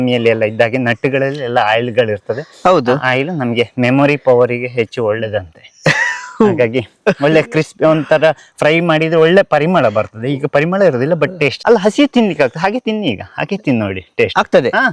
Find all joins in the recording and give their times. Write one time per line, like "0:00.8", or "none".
0:11.6